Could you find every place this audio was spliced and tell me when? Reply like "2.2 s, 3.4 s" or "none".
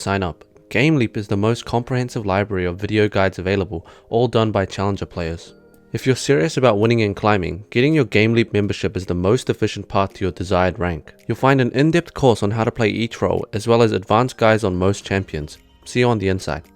15.8 s